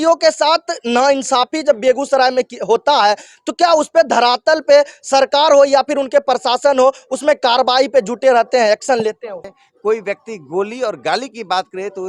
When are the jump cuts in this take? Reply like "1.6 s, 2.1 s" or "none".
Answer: 9.6 s